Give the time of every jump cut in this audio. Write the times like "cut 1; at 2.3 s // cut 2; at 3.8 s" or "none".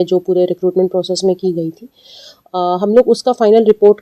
none